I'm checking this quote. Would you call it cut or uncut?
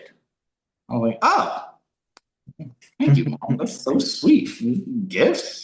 uncut